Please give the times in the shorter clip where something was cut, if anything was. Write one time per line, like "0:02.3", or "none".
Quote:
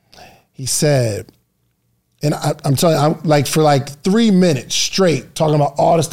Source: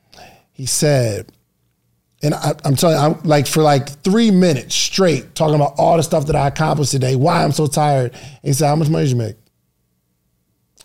none